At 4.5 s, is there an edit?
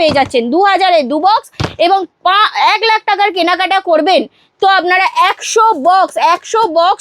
no; 0 cuts

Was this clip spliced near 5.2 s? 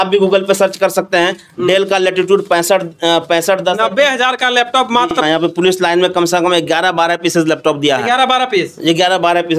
yes; 1 cut; at 5.2 s

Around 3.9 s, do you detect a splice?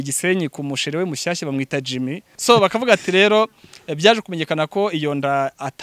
no; 1 cut; at 2.3 s

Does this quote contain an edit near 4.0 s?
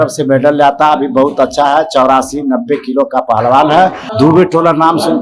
yes; 1 cut; at 4.0 s

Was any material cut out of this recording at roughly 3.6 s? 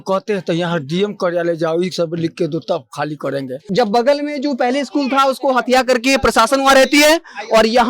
yes; 1 cut; at 3.6 s

